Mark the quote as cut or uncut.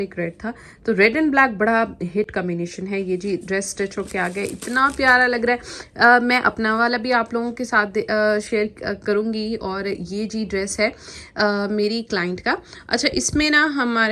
uncut